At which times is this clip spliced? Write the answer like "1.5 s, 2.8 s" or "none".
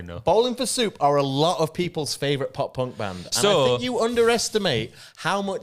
none